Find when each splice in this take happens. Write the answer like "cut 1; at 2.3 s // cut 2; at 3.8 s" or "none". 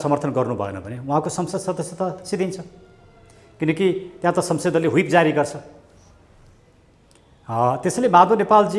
none

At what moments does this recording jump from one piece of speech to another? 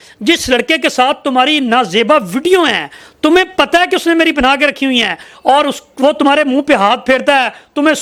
none

